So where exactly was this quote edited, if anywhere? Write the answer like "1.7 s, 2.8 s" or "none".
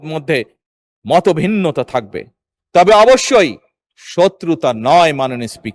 none